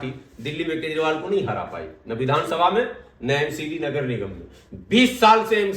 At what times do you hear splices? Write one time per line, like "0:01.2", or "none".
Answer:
none